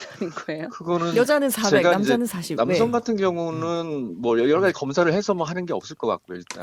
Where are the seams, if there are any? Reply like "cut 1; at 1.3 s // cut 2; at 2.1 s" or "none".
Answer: none

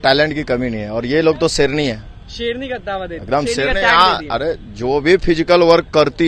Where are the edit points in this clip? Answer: none

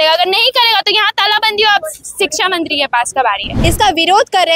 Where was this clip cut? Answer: cut 1; at 3.5 s

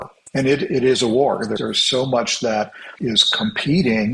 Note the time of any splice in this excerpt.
cut 1; at 1.6 s // cut 2; at 2.8 s

